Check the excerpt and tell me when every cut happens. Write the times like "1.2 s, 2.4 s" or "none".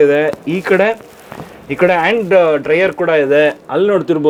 none